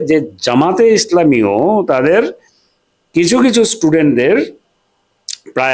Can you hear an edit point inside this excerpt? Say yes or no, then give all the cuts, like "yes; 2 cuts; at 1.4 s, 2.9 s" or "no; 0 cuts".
no; 0 cuts